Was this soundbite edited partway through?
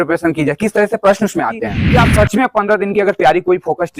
yes; 1 cut; at 1.8 s

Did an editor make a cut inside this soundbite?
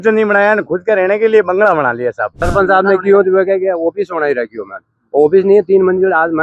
yes; 1 cut; at 2.4 s

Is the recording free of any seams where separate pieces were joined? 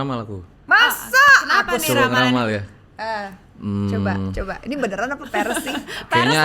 yes; 0 cuts

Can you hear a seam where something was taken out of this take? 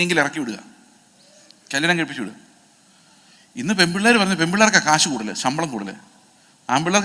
no; 0 cuts

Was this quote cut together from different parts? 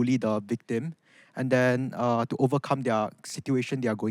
no; 0 cuts

